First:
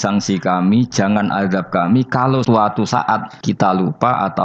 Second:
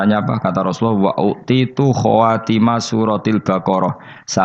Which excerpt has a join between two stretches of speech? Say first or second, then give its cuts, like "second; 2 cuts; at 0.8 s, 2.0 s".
first; 2 cuts; at 2.4 s, 3.3 s